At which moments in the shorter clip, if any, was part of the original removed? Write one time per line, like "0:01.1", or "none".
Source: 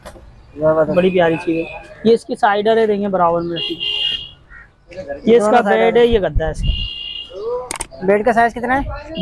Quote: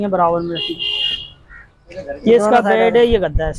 none